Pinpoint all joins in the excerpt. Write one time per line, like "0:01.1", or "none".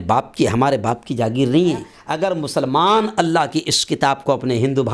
0:02.0